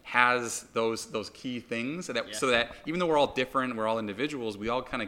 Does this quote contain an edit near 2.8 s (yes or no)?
no